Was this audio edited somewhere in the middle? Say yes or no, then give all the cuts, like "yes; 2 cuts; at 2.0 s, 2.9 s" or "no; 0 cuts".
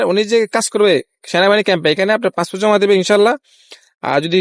no; 0 cuts